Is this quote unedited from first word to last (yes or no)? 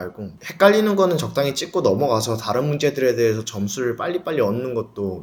yes